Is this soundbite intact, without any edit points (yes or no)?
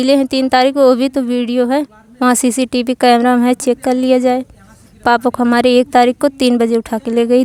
yes